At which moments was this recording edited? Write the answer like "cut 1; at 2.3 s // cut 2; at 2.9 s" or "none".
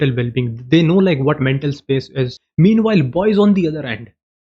cut 1; at 2.4 s